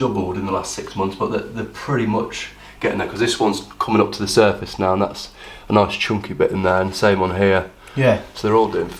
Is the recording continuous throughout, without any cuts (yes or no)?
yes